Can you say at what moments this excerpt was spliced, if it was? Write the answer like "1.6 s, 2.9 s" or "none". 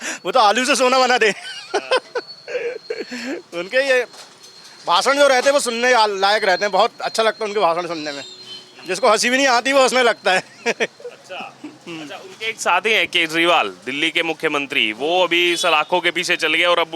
none